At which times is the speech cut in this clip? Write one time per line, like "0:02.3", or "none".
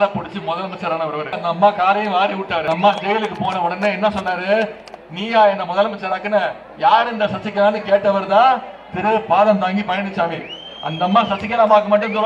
0:01.4
0:02.6